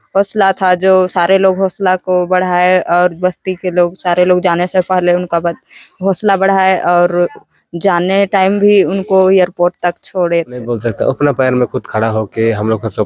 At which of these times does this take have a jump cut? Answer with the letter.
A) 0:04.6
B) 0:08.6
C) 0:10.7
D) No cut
C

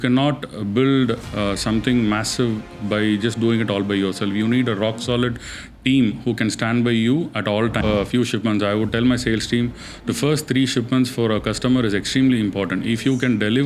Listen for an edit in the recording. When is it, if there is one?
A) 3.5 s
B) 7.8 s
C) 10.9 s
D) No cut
B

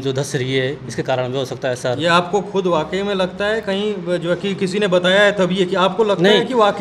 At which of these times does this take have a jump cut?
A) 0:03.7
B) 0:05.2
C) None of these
C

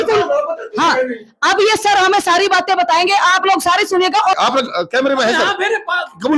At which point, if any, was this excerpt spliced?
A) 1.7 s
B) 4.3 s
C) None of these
B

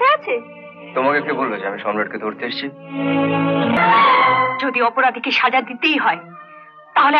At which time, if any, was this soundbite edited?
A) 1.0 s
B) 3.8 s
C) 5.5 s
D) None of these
B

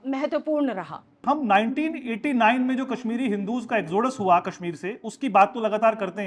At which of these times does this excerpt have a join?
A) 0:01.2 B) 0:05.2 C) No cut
A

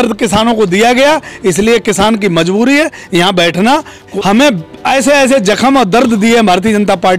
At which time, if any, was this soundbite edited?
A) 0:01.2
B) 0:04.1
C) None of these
B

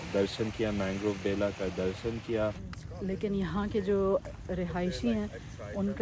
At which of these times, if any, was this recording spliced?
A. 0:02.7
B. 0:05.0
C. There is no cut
A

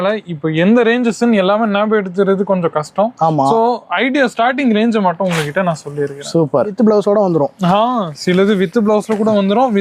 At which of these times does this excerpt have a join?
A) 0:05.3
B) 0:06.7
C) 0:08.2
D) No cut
B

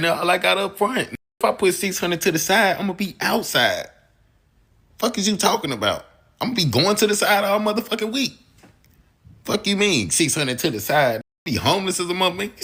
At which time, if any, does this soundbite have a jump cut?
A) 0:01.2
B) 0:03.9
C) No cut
C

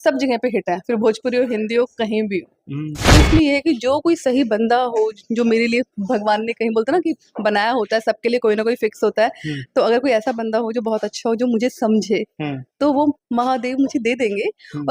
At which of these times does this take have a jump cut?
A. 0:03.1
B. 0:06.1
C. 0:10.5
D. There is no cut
A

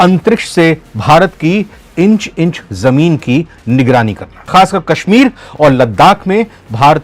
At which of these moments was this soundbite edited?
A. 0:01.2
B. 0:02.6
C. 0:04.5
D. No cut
C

